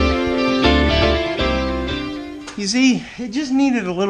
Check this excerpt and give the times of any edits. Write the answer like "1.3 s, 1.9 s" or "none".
2.3 s

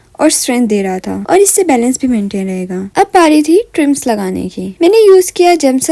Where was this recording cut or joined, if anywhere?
none

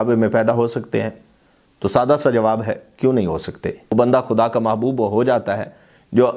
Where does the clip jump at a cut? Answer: 3.9 s

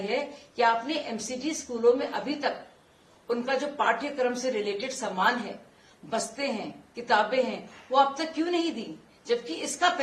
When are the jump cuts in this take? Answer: none

